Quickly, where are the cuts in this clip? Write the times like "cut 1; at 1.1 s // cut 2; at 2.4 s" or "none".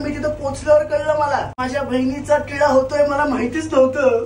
cut 1; at 1.6 s